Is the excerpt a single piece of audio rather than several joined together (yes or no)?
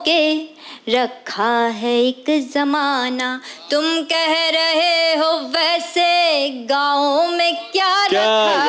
yes